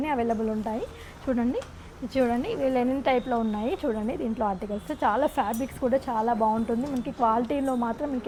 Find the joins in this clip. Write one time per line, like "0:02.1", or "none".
none